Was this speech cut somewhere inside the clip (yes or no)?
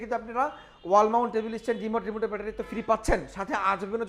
no